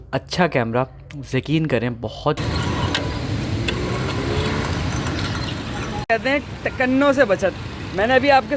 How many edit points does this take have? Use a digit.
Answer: 1